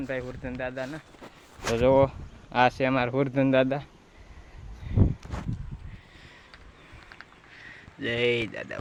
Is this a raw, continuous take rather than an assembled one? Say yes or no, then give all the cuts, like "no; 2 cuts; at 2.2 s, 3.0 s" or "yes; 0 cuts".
yes; 0 cuts